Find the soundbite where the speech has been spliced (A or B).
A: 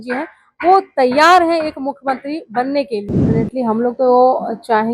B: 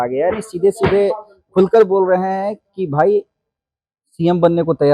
A